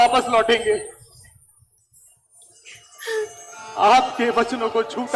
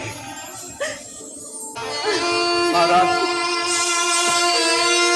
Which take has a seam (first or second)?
second